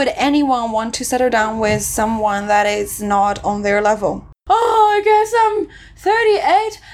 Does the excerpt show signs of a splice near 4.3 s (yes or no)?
yes